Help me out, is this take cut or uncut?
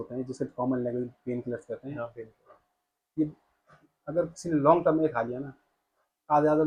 uncut